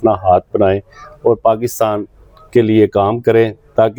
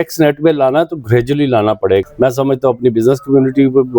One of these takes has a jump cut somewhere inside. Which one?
second; 1 cut; at 2.0 s

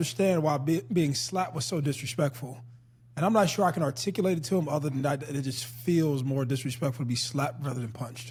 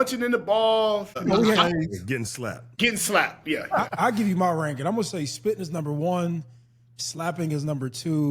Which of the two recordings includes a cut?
second; 3 cuts; at 1.2 s, 2.7 s, 3.9 s

